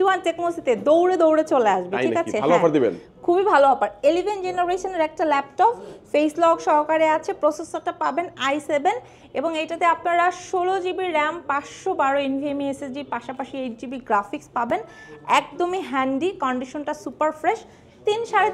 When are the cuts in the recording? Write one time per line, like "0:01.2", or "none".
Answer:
none